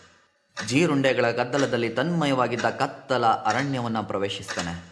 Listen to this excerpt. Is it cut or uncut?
uncut